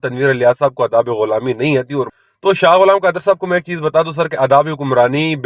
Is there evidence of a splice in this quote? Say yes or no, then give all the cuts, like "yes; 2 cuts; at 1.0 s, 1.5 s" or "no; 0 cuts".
yes; 1 cut; at 2.2 s